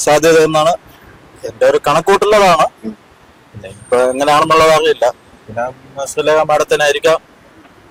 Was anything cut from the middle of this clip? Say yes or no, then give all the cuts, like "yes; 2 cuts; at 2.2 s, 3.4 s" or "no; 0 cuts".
no; 0 cuts